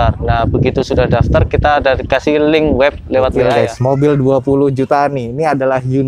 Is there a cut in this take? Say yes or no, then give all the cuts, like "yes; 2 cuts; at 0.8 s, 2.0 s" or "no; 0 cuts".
yes; 1 cut; at 3.4 s